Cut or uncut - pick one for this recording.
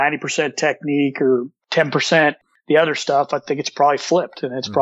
uncut